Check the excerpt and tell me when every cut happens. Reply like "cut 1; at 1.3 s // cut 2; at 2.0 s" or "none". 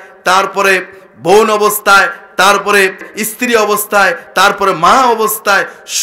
cut 1; at 3.1 s